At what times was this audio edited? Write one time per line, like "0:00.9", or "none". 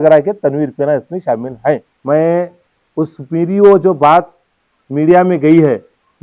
0:01.9